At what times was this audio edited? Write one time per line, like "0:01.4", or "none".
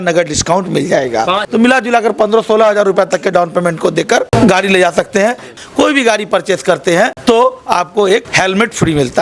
0:01.4
0:05.5
0:07.2
0:08.3